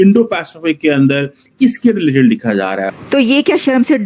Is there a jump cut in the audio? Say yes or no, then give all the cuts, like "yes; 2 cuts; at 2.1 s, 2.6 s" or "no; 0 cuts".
yes; 2 cuts; at 1.4 s, 2.9 s